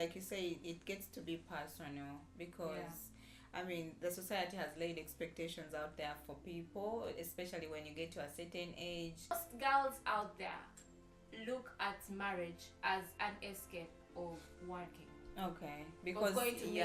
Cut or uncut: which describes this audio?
cut